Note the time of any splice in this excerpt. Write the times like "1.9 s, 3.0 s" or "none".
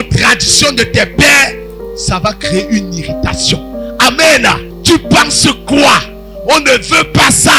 4.7 s